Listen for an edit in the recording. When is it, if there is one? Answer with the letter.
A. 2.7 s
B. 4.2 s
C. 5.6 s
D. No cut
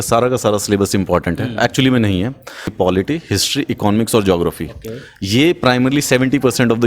A